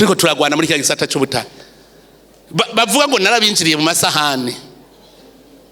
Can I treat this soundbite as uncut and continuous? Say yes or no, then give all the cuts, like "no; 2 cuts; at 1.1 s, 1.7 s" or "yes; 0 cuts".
yes; 0 cuts